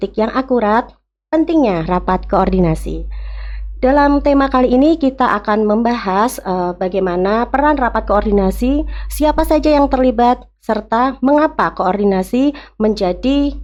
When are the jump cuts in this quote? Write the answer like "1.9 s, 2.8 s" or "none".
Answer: none